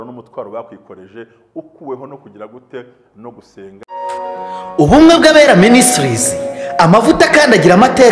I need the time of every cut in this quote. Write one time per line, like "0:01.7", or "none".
0:03.8

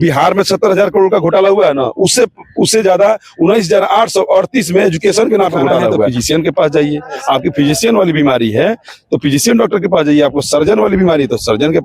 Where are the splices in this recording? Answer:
0:06.1

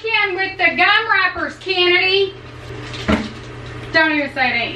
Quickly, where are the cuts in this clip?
0:02.7

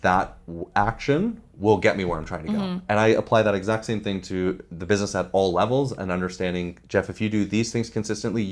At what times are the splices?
none

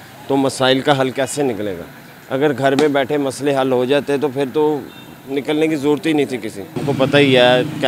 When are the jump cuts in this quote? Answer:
0:06.8

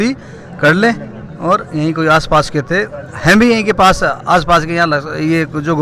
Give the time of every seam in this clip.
none

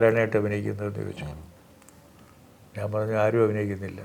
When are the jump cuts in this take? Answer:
none

